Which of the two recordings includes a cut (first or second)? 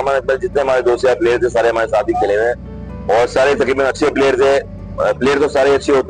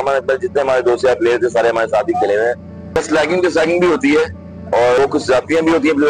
second